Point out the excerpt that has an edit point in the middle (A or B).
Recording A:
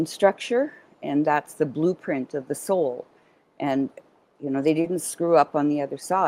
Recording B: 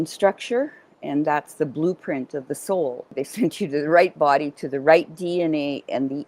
B